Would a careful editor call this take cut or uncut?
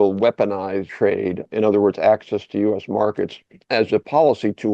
cut